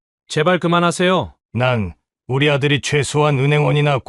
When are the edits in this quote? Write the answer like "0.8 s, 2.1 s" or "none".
1.4 s